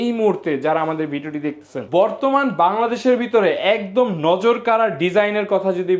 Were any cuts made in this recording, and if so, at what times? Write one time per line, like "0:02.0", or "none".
0:01.8